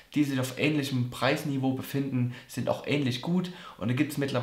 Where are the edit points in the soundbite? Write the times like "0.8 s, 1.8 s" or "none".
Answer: none